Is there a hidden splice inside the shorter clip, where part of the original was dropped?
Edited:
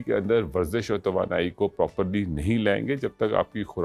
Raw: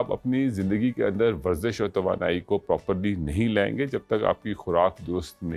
no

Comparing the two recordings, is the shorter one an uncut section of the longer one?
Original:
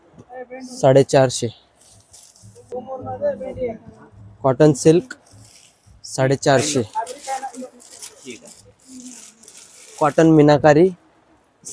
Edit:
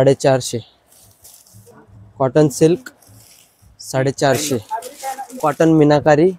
no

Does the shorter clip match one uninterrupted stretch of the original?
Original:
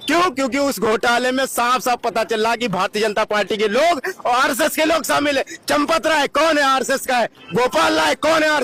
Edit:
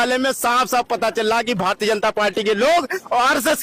yes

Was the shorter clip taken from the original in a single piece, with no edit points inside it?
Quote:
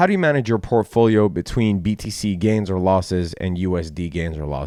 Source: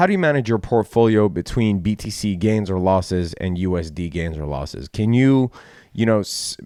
yes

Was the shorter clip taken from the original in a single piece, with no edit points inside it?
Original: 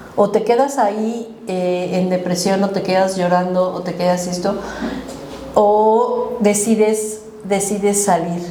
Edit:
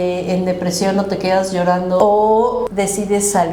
no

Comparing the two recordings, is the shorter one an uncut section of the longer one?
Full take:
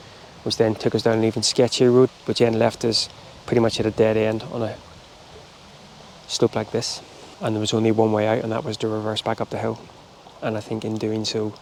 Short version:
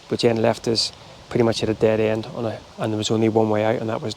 no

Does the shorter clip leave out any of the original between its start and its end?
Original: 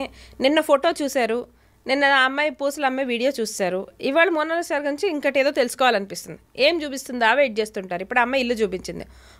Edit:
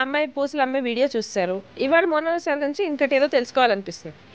no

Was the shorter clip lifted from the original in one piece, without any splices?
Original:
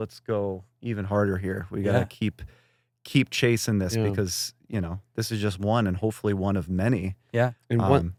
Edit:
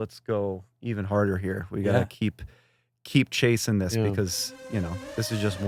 yes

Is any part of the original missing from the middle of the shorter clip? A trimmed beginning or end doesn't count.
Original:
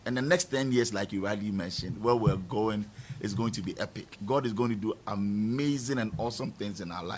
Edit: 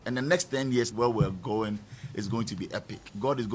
yes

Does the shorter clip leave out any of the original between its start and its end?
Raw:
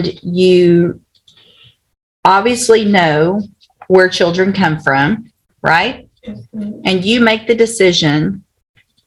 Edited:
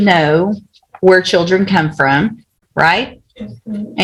no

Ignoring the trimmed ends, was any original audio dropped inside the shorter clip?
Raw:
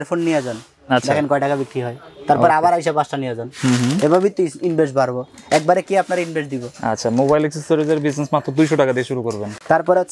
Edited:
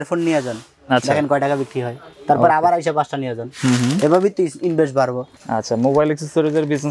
yes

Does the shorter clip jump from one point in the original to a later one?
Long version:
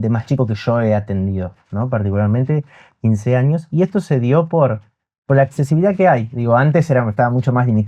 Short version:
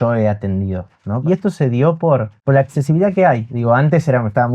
yes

